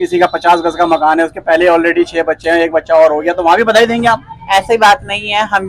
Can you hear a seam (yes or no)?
no